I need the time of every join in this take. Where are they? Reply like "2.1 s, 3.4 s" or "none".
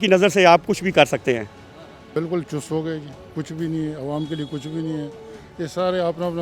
1.6 s